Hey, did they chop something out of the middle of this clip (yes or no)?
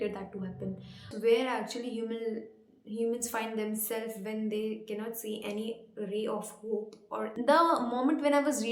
yes